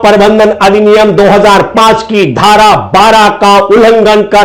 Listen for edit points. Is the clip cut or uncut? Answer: uncut